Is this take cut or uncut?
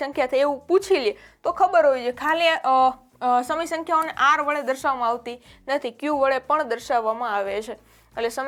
uncut